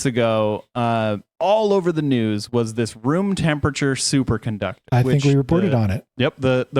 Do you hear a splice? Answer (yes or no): no